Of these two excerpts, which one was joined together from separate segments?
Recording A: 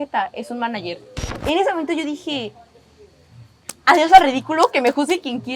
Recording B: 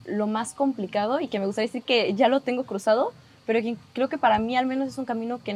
A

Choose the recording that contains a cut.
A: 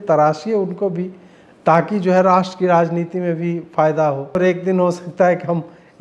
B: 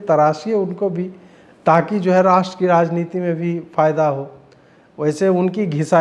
A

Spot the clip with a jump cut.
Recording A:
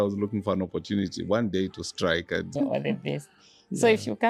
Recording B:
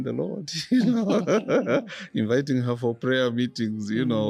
A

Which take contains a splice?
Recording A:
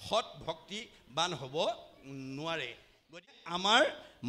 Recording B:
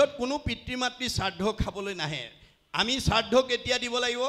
A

